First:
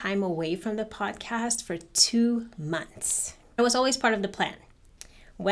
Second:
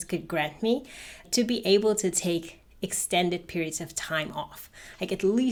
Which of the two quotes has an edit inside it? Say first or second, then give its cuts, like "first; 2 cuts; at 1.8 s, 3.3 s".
first; 1 cut; at 3.6 s